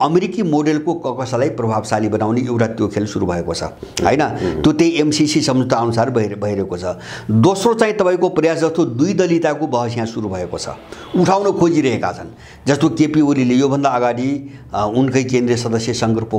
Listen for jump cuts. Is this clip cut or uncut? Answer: uncut